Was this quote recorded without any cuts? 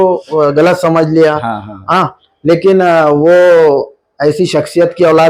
yes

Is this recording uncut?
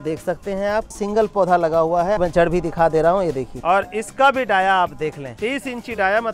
no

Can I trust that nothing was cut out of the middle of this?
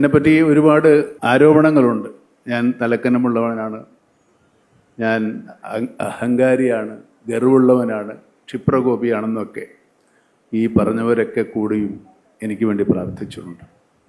no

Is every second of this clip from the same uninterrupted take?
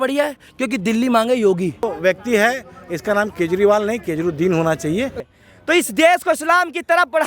no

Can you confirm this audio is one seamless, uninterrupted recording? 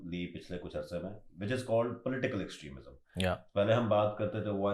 yes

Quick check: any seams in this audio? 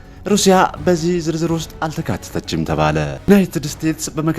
yes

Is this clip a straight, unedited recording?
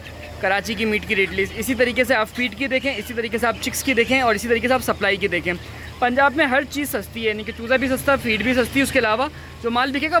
yes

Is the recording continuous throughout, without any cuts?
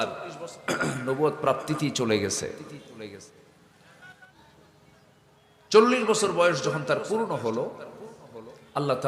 no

